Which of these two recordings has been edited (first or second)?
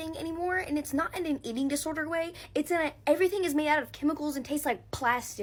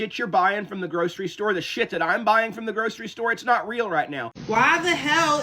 second